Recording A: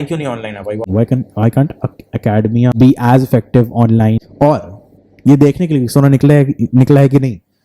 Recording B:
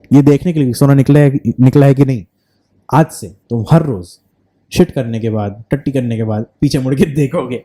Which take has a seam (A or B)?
A